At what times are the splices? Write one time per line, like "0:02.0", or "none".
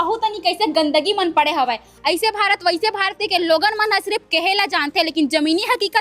0:01.9